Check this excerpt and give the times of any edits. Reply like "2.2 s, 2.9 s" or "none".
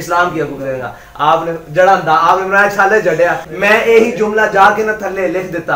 3.5 s